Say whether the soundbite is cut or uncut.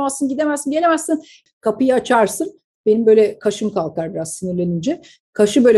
cut